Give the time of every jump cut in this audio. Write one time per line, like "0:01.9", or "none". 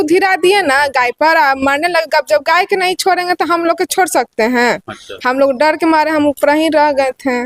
none